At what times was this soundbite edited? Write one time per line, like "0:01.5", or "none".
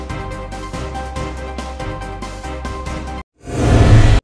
0:00.8
0:02.4